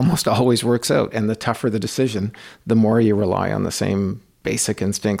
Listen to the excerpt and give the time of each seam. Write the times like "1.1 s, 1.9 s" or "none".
none